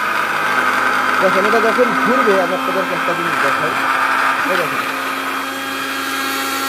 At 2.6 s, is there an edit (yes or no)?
no